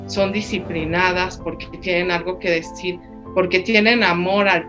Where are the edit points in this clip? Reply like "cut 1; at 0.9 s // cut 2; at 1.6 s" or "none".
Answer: none